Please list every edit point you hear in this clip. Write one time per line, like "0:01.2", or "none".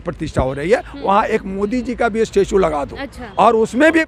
none